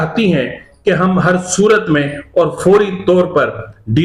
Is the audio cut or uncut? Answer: uncut